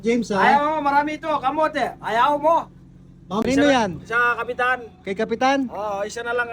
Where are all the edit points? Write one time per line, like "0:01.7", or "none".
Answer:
0:03.4